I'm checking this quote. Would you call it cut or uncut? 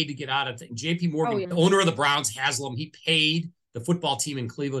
cut